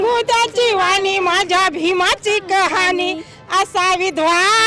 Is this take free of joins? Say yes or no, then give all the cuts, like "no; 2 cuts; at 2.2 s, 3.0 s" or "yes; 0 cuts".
yes; 0 cuts